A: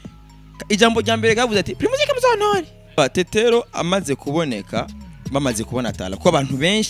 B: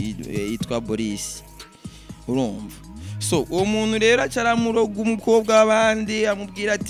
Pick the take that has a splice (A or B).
A